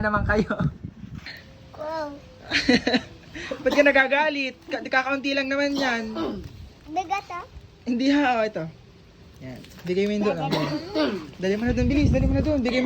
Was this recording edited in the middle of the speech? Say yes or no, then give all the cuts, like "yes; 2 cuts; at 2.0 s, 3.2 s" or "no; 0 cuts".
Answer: yes; 1 cut; at 1.4 s